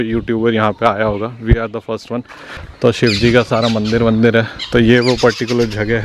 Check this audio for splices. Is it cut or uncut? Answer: uncut